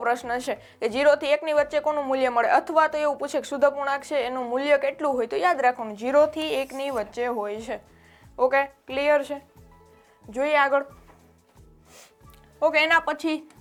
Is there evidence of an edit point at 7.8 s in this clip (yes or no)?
no